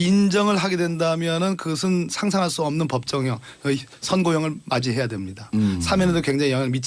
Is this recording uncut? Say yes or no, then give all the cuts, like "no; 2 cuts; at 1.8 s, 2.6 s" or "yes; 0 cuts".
yes; 0 cuts